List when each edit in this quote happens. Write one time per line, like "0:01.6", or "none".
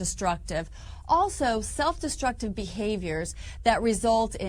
0:01.3